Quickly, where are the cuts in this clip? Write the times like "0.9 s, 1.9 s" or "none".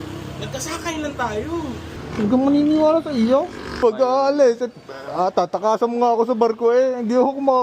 3.8 s